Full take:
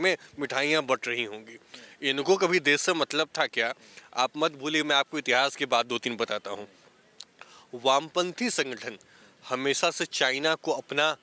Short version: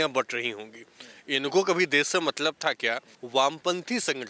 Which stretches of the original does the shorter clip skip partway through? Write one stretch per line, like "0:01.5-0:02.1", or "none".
0:03.9-0:07.6